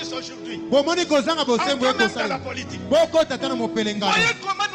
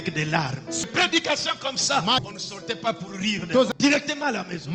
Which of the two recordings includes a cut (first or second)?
second